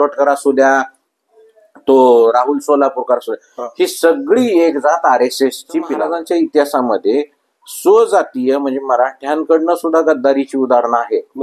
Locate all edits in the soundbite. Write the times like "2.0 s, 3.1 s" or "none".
6.0 s

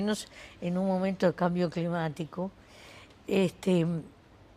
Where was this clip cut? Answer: none

